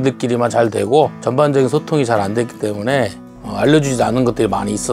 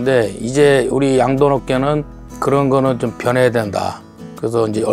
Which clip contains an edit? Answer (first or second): first